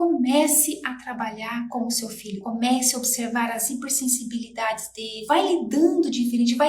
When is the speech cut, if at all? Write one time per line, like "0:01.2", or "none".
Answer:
0:05.1